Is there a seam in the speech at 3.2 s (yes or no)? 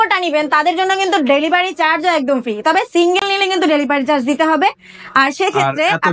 no